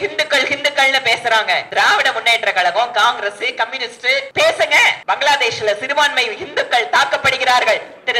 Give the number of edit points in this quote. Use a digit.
3